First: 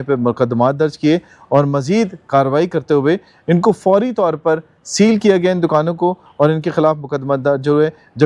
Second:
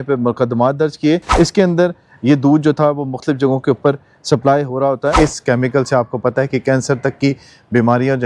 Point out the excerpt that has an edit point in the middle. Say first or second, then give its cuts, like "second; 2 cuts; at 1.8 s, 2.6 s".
second; 2 cuts; at 1.3 s, 5.1 s